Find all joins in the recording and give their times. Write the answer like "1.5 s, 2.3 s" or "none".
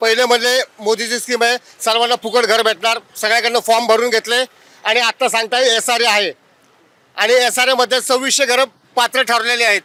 none